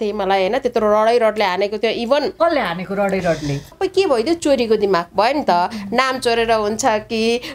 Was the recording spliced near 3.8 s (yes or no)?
yes